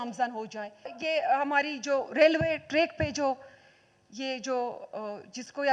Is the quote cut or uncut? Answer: cut